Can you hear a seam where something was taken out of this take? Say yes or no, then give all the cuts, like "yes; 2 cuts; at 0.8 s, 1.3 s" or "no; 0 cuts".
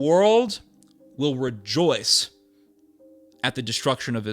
no; 0 cuts